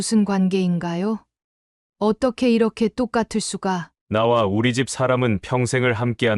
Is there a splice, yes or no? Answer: yes